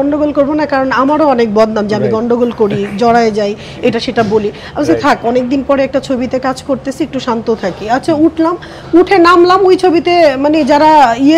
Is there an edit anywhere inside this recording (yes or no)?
no